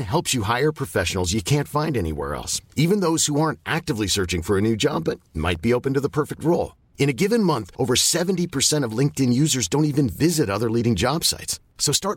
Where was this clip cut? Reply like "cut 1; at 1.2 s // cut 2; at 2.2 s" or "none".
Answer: none